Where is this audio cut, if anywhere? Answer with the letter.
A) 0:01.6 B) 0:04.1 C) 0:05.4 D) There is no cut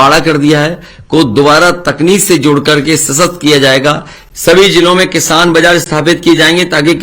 B